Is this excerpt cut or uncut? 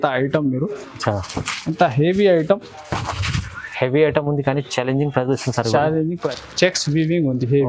cut